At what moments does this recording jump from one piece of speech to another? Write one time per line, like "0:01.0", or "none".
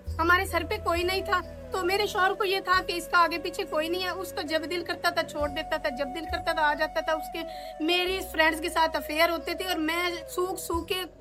none